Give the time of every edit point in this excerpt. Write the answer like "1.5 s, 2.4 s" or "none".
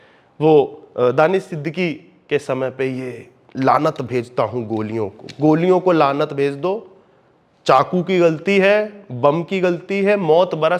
none

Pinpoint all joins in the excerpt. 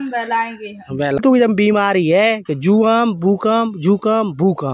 1.2 s

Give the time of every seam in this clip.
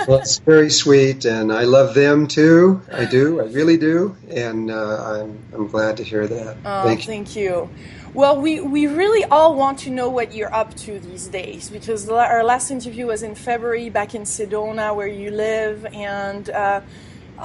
1.1 s

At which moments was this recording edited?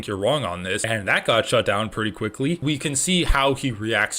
2.6 s

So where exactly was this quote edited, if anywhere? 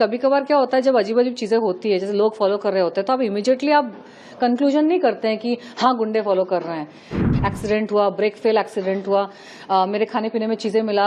7.1 s

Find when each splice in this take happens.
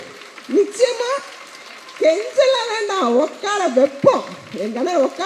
none

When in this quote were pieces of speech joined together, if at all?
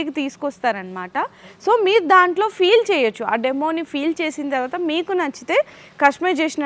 none

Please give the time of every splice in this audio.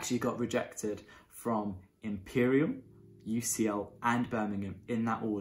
none

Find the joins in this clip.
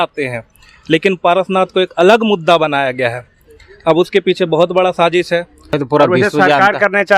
5.6 s

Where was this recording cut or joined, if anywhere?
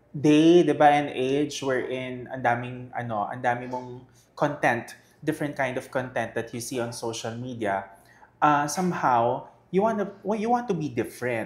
none

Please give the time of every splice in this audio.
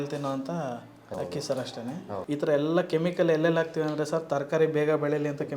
1.1 s, 2.2 s

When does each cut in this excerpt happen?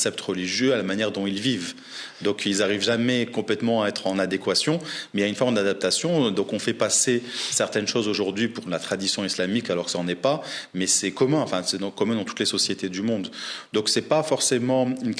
none

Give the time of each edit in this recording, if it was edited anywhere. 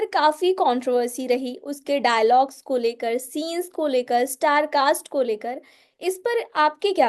none

